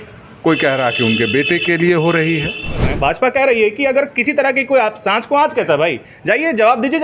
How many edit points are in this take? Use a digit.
1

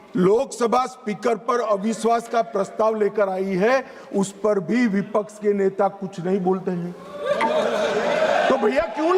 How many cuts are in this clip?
0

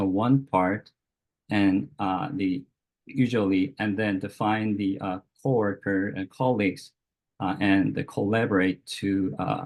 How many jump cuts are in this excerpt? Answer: 0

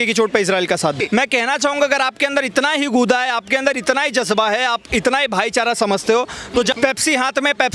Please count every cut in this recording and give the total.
2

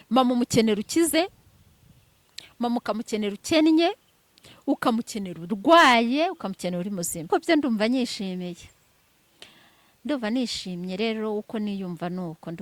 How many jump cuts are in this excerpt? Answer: 1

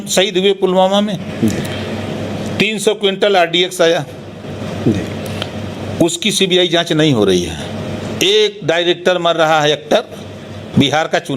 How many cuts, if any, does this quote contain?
0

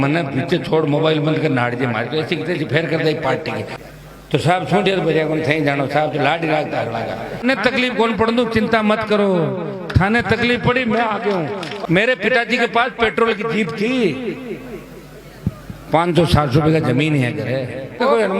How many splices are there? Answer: 3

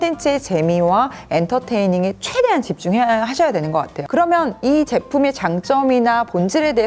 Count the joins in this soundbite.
0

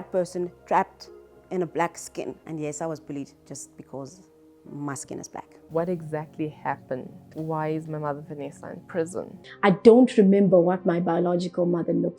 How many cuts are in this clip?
4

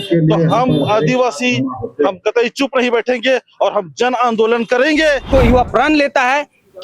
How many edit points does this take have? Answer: 1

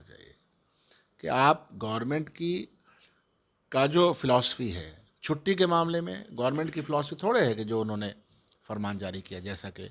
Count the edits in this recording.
0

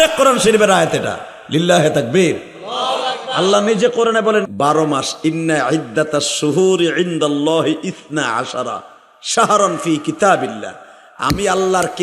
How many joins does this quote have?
1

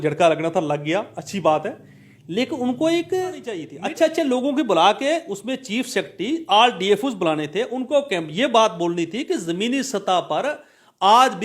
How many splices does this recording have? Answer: 1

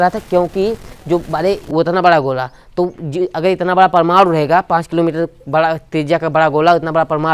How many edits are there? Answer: 1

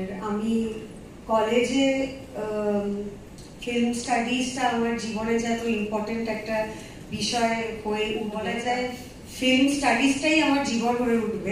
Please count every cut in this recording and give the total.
1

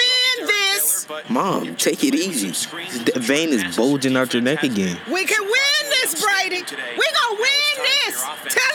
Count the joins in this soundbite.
0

